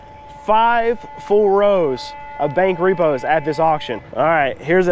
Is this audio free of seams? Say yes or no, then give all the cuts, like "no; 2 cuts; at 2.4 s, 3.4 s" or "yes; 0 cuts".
no; 1 cut; at 4.0 s